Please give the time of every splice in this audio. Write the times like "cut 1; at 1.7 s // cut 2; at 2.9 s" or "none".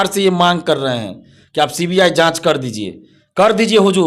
none